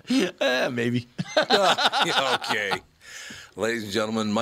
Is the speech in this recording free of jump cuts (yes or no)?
yes